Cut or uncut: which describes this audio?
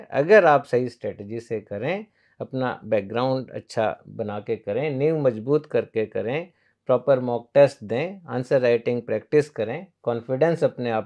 uncut